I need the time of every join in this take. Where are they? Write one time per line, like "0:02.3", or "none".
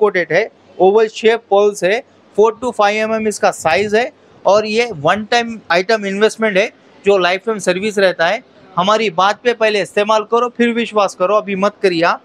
none

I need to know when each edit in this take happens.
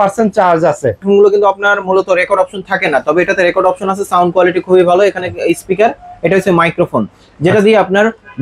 0:01.0

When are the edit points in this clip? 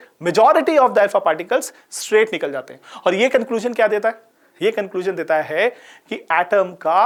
none

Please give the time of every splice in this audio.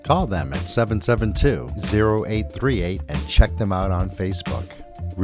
none

